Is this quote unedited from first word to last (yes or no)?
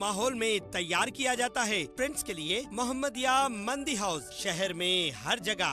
no